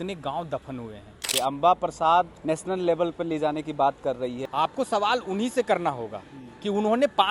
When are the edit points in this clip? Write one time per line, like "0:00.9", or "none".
0:01.3
0:02.4
0:04.4